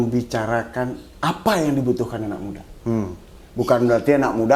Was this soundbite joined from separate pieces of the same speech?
no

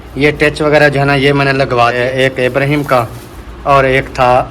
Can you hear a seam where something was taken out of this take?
yes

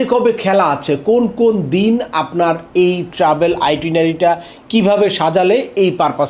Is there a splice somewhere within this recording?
no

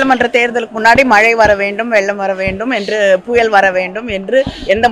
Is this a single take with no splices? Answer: yes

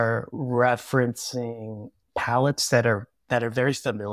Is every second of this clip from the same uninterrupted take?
yes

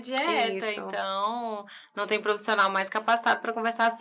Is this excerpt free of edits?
yes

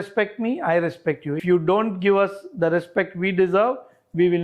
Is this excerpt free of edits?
no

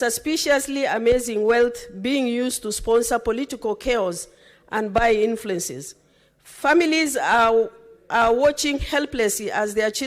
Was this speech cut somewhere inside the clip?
no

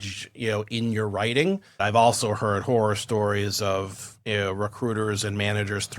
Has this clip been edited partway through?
yes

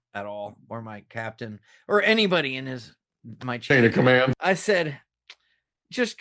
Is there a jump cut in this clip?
yes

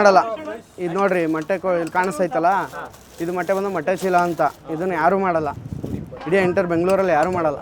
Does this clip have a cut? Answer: no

